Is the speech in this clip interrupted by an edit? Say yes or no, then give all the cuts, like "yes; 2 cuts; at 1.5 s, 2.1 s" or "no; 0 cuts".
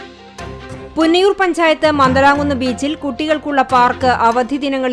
no; 0 cuts